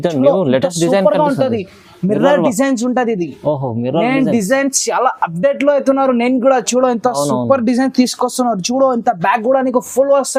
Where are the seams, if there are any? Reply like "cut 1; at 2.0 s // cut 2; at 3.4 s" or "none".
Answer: none